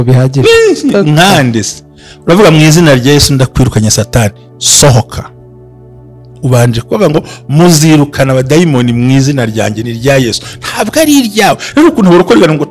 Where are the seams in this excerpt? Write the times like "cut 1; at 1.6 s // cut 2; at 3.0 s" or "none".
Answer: none